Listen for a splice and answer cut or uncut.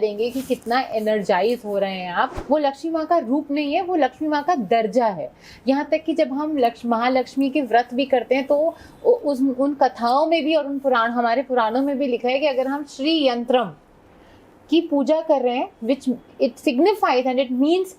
cut